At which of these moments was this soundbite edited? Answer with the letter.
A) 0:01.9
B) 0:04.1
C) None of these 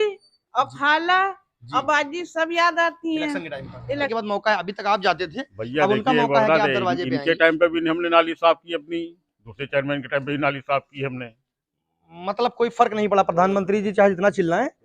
B